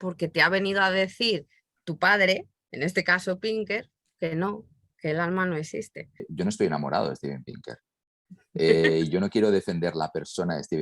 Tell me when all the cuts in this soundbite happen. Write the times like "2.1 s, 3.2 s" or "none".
6.3 s

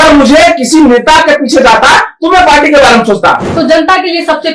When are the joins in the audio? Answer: 3.5 s

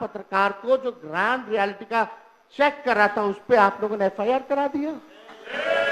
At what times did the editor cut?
none

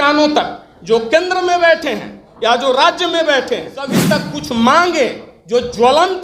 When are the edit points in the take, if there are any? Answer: 4.1 s

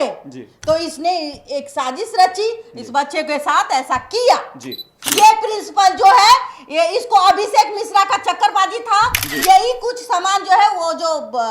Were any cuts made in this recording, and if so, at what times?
5.0 s

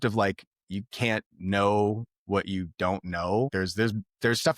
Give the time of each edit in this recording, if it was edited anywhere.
3.5 s

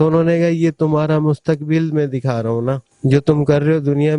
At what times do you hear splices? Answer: 2.9 s

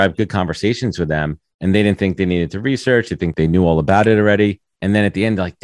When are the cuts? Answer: 3.3 s, 4.7 s

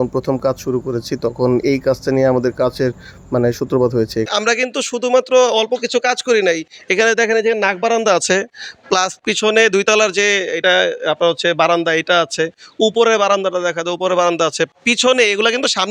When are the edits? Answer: 4.3 s

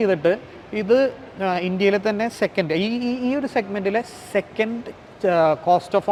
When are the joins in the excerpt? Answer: none

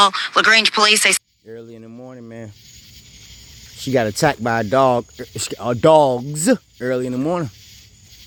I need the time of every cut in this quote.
none

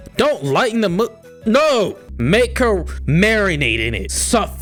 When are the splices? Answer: none

